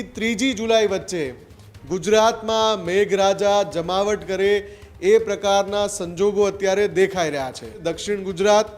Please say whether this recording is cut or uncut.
cut